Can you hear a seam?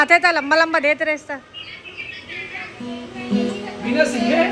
no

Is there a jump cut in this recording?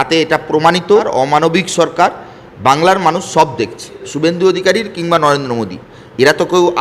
yes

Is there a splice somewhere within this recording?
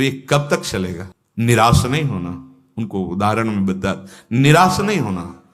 no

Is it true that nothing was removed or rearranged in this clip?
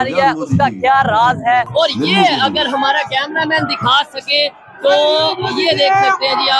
no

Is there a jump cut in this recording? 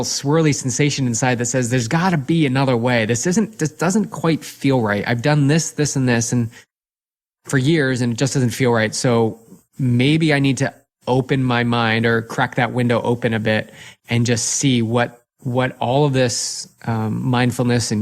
no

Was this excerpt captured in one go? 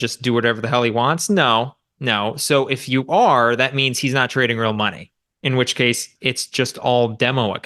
no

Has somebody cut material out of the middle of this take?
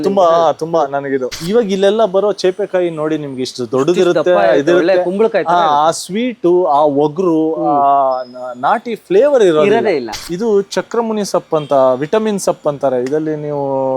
yes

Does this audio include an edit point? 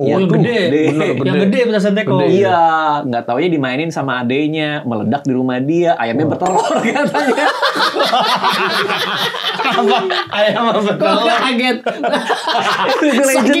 no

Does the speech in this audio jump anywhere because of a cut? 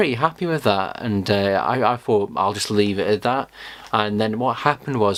no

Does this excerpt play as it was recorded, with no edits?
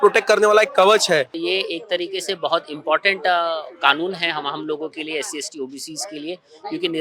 no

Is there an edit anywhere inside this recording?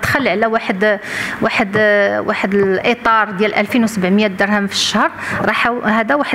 no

